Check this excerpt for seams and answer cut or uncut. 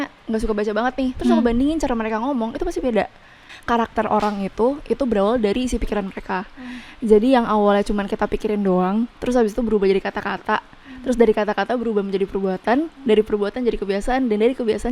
cut